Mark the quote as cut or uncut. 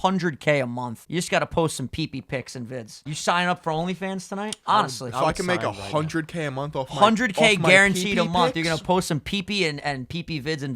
cut